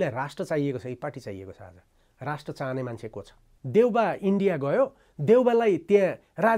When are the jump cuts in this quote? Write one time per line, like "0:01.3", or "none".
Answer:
0:03.5